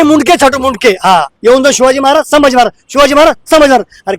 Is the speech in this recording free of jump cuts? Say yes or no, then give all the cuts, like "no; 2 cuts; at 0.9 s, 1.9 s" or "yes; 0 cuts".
no; 1 cut; at 1.3 s